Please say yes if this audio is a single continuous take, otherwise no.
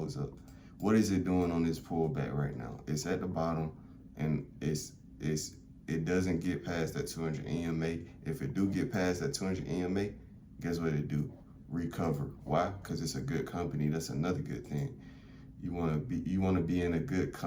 yes